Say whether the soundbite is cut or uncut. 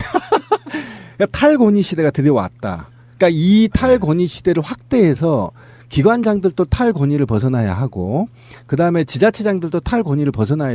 uncut